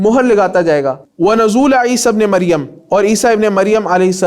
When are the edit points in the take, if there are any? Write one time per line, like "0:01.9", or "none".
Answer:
0:01.1